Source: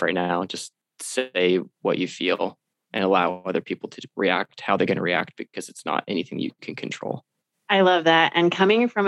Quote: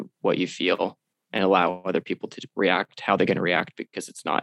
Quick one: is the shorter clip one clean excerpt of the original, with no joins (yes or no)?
yes